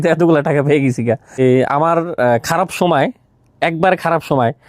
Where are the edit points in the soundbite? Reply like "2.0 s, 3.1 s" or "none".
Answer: 1.4 s